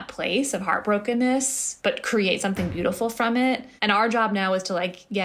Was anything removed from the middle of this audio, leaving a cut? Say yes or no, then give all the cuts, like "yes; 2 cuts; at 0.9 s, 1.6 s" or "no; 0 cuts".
no; 0 cuts